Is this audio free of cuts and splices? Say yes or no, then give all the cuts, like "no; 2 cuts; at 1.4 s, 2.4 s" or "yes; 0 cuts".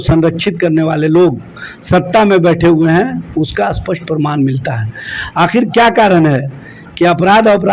yes; 0 cuts